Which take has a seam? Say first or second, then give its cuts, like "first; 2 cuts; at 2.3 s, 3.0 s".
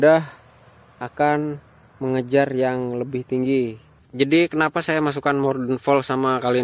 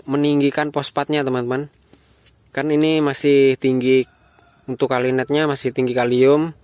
first; 1 cut; at 4.0 s